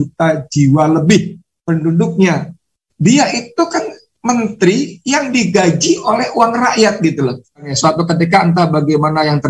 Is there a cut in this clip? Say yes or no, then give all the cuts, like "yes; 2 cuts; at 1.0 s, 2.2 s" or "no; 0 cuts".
yes; 1 cut; at 7.7 s